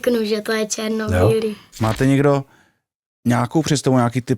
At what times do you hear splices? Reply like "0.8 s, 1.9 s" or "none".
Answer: 1.7 s